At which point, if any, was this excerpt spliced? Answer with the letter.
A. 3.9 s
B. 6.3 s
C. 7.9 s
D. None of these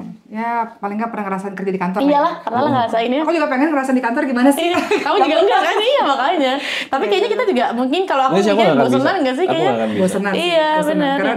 D